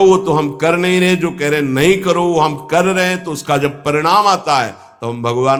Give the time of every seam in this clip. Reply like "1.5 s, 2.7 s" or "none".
none